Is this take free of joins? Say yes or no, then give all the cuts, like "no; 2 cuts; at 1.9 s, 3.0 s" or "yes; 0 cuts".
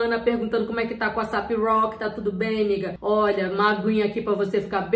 no; 1 cut; at 2.9 s